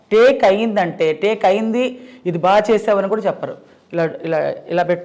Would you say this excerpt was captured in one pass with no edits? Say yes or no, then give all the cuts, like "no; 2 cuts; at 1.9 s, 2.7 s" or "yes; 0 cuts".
yes; 0 cuts